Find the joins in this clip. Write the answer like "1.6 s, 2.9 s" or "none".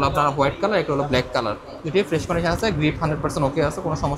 none